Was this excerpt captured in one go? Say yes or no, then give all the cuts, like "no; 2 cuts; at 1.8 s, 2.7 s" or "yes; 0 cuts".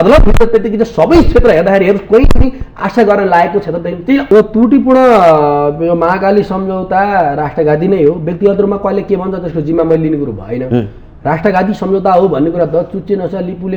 no; 1 cut; at 4.2 s